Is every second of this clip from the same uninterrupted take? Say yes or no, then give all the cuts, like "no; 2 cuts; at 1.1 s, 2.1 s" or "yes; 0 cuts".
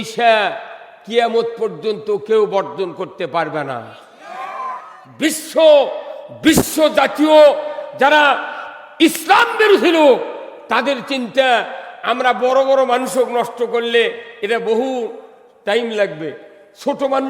no; 1 cut; at 5.0 s